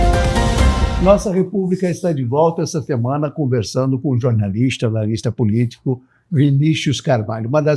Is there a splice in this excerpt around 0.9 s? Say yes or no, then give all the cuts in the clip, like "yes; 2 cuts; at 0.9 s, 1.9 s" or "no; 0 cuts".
yes; 1 cut; at 0.9 s